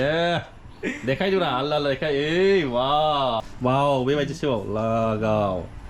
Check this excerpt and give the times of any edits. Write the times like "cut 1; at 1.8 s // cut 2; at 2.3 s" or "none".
cut 1; at 3.4 s